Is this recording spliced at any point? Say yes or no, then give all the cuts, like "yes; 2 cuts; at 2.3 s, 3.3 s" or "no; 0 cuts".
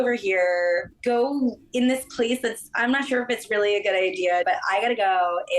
yes; 2 cuts; at 0.9 s, 4.4 s